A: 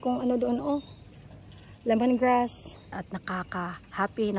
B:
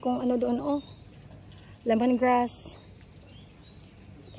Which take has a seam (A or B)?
A